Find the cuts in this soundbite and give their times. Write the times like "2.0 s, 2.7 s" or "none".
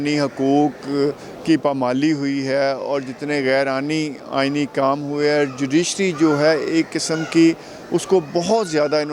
none